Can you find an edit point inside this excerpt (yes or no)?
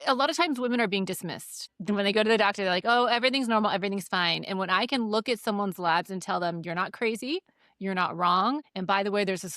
yes